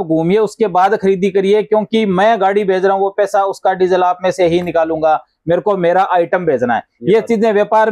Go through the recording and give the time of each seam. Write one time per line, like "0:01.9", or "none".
none